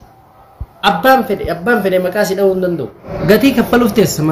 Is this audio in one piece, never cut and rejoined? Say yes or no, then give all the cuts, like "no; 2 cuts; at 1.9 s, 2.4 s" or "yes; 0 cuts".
no; 1 cut; at 3.1 s